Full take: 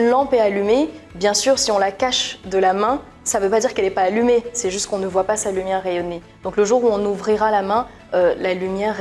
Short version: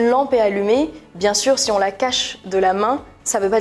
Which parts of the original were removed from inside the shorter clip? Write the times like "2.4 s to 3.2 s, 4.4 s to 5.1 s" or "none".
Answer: none